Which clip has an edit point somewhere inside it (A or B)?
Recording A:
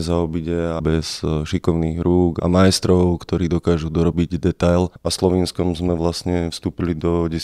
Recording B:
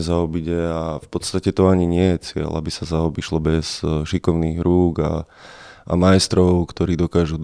A